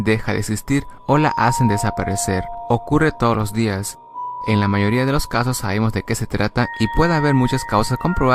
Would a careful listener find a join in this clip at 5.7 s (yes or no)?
no